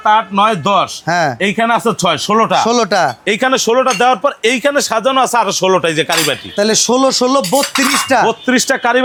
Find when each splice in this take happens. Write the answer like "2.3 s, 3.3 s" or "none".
none